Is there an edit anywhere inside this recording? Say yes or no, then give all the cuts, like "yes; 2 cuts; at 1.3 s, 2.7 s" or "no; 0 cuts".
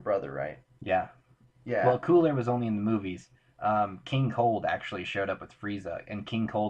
no; 0 cuts